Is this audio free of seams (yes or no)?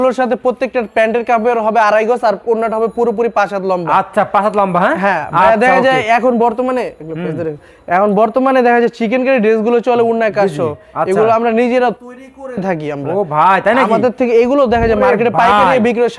yes